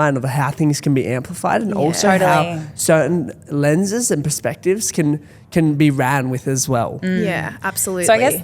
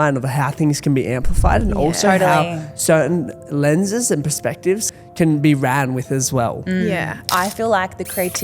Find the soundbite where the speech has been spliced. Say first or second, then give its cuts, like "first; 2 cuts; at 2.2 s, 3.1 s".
second; 2 cuts; at 4.9 s, 7.2 s